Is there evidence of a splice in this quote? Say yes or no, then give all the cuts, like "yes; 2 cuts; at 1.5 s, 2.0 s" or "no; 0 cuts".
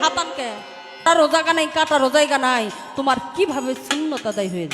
yes; 1 cut; at 1.1 s